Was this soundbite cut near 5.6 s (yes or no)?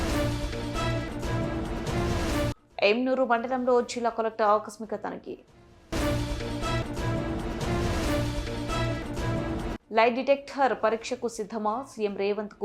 no